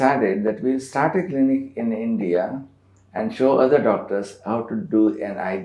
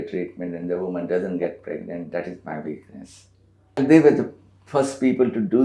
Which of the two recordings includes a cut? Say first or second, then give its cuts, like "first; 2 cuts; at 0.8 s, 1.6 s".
second; 1 cut; at 3.8 s